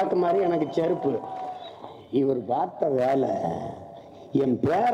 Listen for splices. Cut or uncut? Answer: cut